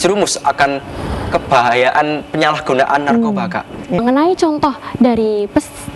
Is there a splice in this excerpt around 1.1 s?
no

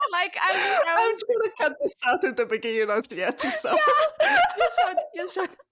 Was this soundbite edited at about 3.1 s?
yes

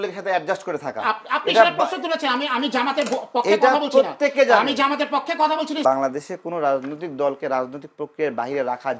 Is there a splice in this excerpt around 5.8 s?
yes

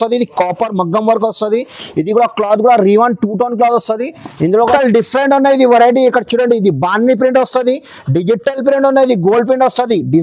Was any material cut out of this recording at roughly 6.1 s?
no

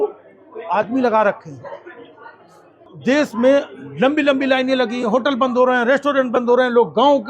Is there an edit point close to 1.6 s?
no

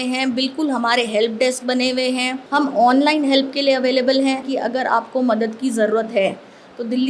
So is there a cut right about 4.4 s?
yes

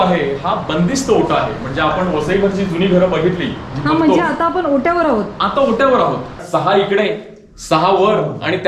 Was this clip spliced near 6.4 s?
yes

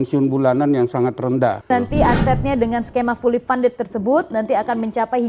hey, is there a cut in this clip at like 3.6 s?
no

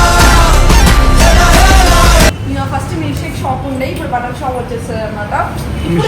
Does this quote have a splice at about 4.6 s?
no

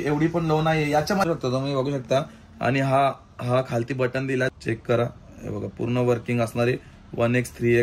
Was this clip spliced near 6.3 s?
no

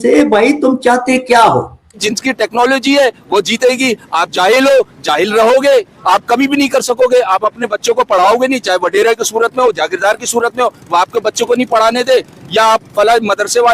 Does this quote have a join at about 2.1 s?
yes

